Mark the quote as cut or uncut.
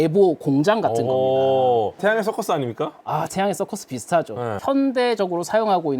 cut